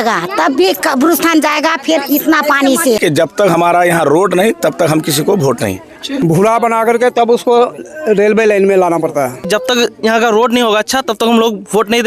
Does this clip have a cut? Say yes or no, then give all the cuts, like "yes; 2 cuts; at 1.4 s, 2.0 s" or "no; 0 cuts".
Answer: yes; 3 cuts; at 3.0 s, 6.2 s, 9.4 s